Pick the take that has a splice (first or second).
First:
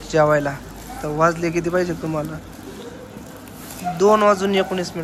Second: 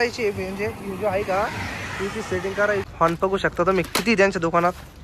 second